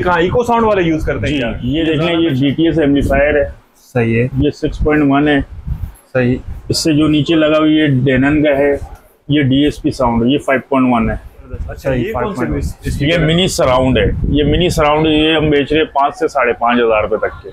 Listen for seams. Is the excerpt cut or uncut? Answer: cut